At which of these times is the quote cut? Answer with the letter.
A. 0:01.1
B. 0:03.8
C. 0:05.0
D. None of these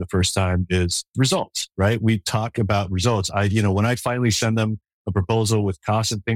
A